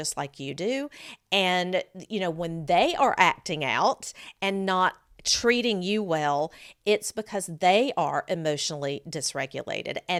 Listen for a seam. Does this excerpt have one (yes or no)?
no